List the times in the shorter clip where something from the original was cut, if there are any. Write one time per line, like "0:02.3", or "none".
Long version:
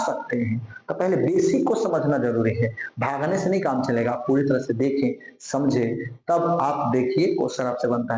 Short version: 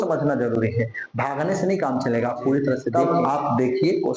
0:02.9